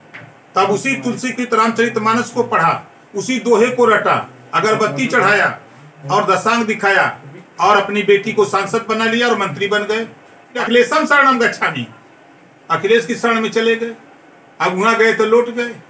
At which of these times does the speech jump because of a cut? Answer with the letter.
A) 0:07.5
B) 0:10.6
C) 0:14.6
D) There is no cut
B